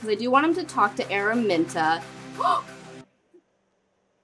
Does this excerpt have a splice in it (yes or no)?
no